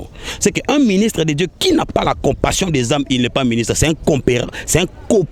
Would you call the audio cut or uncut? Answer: uncut